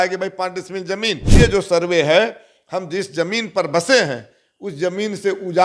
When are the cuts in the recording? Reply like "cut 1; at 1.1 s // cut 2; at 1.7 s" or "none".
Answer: cut 1; at 1.2 s

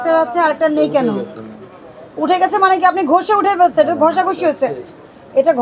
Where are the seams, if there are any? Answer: none

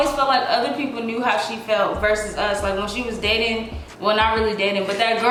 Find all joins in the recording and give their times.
none

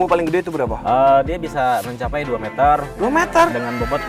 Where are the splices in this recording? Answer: none

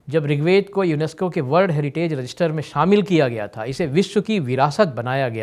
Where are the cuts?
none

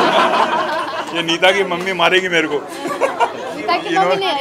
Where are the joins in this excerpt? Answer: none

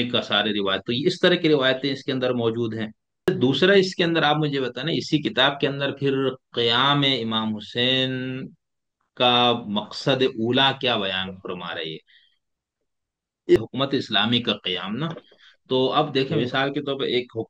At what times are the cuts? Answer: cut 1; at 3.3 s // cut 2; at 13.6 s

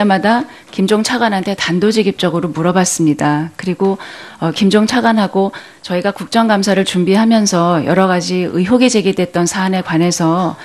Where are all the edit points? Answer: cut 1; at 7.5 s

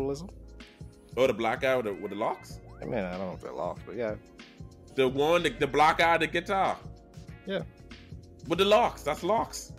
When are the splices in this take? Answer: cut 1; at 4.8 s

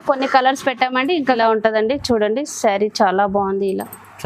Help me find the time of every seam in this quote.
cut 1; at 1.4 s

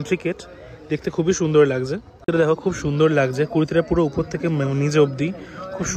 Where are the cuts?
none

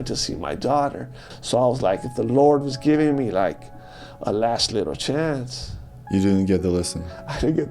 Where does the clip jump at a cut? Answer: cut 1; at 1.2 s

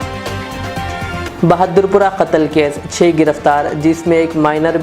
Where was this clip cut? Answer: cut 1; at 1.2 s

